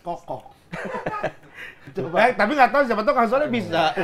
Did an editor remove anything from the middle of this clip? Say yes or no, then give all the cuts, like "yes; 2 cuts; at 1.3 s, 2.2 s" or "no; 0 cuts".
yes; 1 cut; at 1.9 s